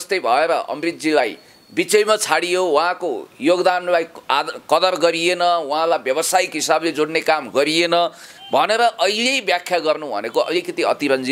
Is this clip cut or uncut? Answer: uncut